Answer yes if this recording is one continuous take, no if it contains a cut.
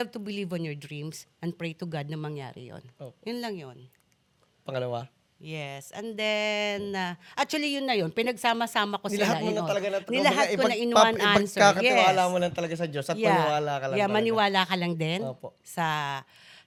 yes